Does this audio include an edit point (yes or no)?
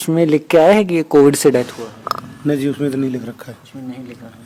no